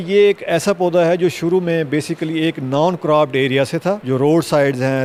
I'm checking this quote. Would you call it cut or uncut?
uncut